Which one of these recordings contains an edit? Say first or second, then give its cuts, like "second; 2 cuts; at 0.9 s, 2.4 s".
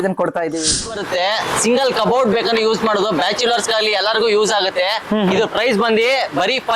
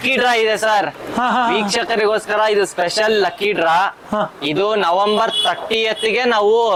first; 1 cut; at 1.0 s